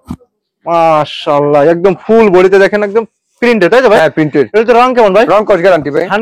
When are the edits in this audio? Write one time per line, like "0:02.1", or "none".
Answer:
none